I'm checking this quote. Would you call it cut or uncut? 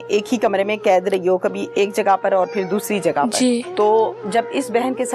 cut